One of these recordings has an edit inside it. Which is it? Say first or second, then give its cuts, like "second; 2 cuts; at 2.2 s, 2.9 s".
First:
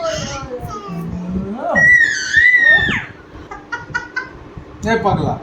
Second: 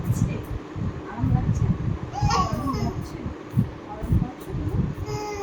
first; 1 cut; at 3.4 s